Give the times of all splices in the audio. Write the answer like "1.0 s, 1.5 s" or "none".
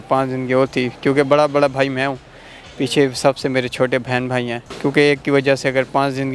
4.6 s